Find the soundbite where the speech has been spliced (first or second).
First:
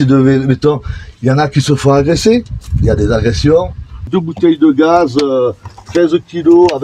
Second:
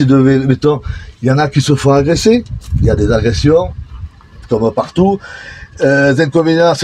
first